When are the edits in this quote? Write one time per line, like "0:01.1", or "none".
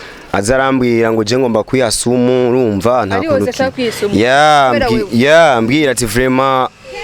none